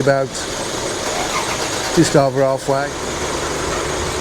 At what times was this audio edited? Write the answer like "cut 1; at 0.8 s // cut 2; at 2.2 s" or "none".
cut 1; at 3.0 s

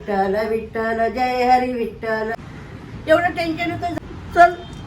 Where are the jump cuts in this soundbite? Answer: cut 1; at 2.4 s // cut 2; at 3.9 s

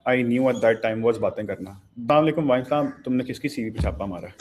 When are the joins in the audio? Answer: cut 1; at 2.0 s

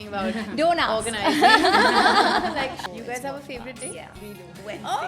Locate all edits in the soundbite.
cut 1; at 2.9 s

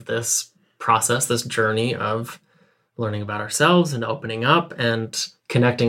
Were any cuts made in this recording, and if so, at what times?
none

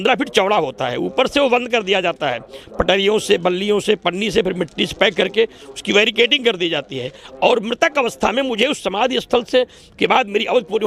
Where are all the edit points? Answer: none

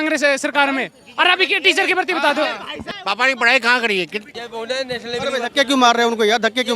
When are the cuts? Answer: cut 1; at 2.7 s // cut 2; at 4.4 s

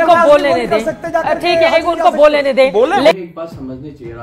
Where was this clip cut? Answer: cut 1; at 3.1 s

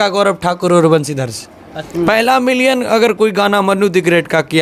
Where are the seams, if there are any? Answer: cut 1; at 1.8 s

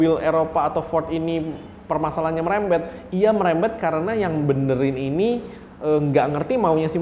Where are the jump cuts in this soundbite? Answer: none

